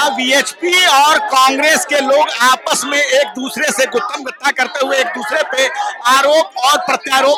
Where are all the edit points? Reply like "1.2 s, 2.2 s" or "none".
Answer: none